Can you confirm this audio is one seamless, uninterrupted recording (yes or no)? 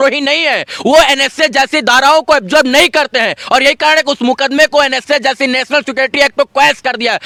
yes